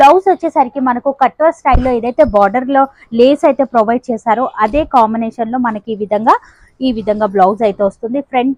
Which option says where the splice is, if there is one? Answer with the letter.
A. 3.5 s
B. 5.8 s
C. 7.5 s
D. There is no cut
D